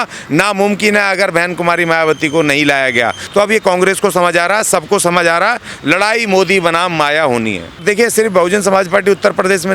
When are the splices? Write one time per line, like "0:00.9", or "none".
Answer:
0:03.2
0:07.8